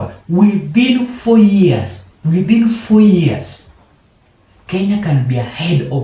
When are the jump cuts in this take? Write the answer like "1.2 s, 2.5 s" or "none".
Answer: none